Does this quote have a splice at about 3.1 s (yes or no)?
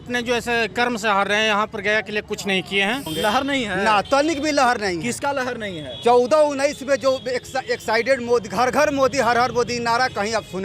yes